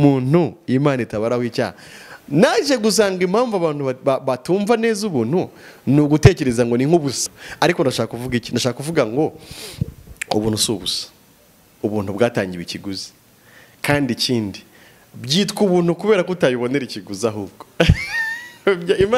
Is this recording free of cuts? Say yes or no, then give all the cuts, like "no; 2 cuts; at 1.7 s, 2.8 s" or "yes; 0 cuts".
no; 1 cut; at 7.3 s